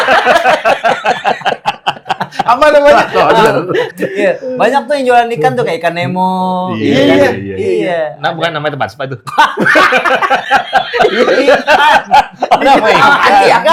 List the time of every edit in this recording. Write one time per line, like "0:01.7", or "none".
none